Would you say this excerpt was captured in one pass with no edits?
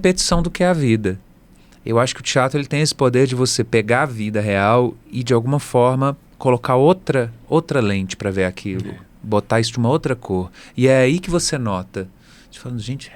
yes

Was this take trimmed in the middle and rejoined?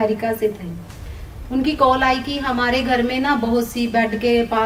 no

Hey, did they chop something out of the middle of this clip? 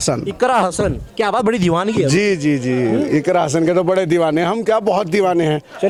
no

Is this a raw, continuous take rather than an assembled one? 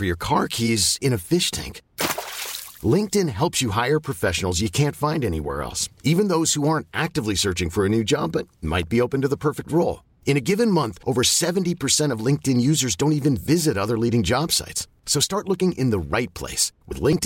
yes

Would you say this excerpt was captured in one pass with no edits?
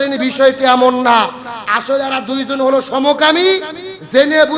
yes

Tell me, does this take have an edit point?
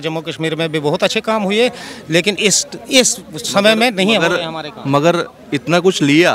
no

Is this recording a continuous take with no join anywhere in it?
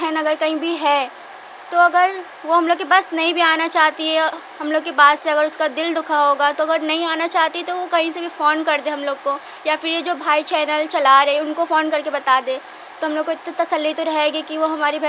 yes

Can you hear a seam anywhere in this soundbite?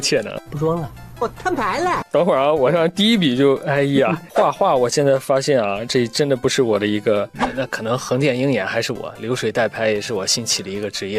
yes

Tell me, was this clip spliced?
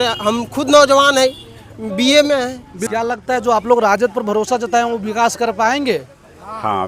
yes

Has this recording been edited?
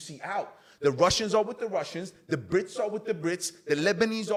no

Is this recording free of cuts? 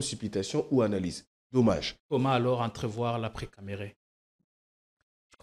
no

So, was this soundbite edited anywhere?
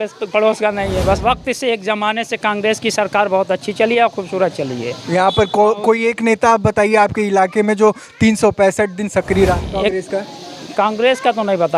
yes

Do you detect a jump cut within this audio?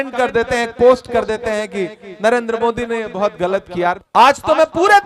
yes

